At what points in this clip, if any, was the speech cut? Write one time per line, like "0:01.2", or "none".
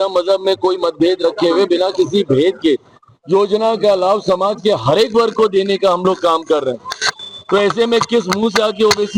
none